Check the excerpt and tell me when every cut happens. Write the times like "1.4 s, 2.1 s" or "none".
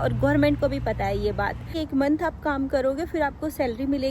1.8 s